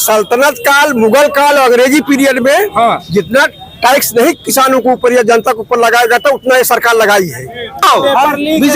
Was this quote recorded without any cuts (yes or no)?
no